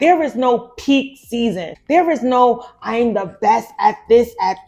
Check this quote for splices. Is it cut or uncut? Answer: cut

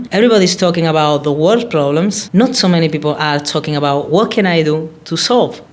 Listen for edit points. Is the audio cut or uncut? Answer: uncut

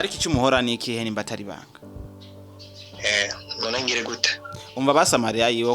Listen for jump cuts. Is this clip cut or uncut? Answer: cut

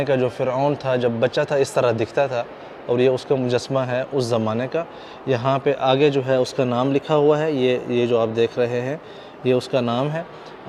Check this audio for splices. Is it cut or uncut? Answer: uncut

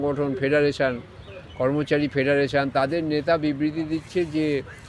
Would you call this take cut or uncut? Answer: uncut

